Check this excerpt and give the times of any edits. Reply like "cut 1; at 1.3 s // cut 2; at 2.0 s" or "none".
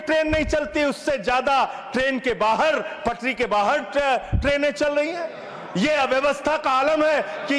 none